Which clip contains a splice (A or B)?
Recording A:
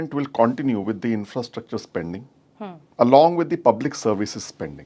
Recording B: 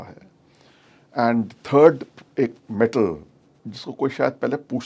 A